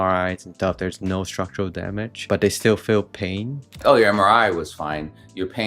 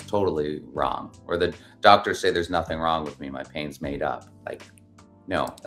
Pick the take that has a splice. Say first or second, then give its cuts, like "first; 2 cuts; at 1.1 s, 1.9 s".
first; 2 cuts; at 2.1 s, 3.7 s